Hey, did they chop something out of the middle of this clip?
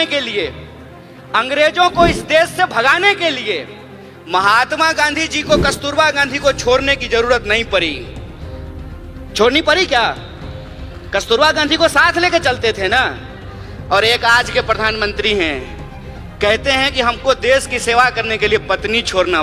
no; 0 cuts

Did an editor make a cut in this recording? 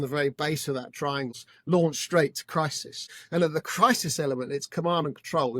yes; 1 cut; at 1.5 s

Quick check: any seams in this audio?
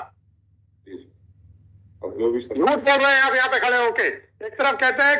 no; 0 cuts

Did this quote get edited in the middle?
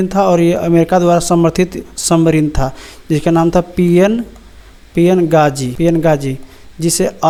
no; 0 cuts

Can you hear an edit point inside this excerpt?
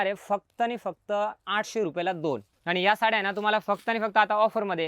yes; 1 cut; at 2.5 s

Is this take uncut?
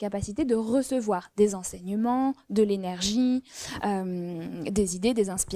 yes; 0 cuts

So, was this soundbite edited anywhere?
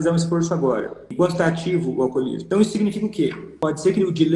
yes; 3 cuts; at 1.0 s, 2.4 s, 3.5 s

